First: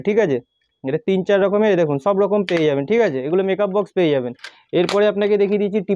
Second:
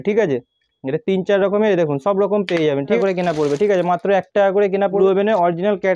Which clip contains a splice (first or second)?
second